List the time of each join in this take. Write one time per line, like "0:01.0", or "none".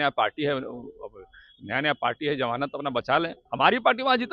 0:03.4